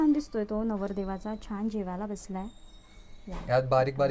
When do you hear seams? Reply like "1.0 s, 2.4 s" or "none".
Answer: none